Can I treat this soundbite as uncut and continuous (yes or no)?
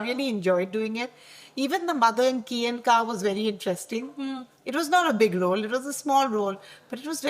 yes